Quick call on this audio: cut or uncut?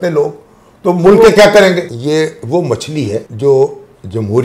cut